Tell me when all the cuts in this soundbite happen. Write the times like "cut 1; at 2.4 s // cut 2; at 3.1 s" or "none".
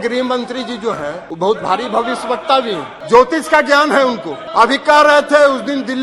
cut 1; at 1.2 s // cut 2; at 2.9 s // cut 3; at 4.4 s

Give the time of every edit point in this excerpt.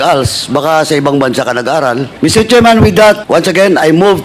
cut 1; at 2.1 s // cut 2; at 3.2 s

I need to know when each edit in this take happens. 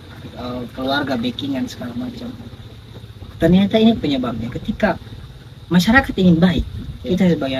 none

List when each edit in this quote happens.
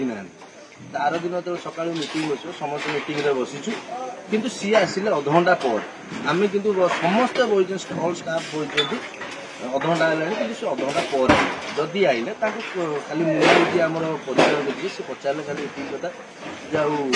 none

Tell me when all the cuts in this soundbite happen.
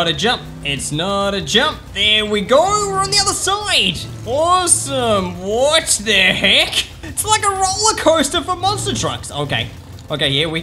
none

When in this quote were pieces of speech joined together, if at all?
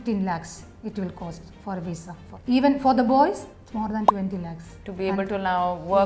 cut 1; at 2.3 s // cut 2; at 3.5 s // cut 3; at 4.8 s

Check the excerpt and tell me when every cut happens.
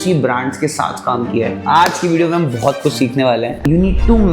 cut 1; at 1.6 s // cut 2; at 3.6 s

